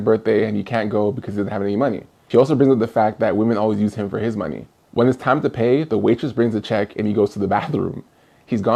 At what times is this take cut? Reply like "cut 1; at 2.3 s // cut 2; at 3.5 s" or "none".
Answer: none